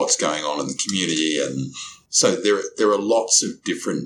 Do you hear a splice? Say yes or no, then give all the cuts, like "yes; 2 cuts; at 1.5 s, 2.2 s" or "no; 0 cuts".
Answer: no; 0 cuts